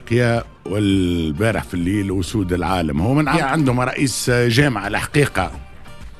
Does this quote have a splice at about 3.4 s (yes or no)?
yes